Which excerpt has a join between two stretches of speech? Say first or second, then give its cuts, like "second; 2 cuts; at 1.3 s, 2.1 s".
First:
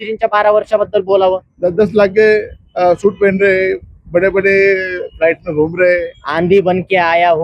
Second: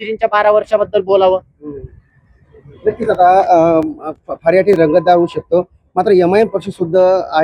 first; 2 cuts; at 1.5 s, 6.2 s